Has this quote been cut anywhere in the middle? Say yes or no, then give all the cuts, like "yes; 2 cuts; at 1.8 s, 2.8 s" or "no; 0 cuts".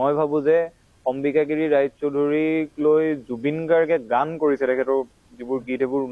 no; 0 cuts